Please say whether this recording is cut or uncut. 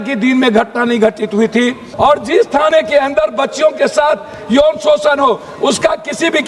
cut